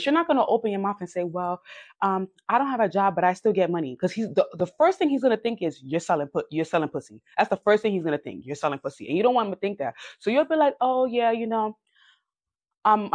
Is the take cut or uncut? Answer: uncut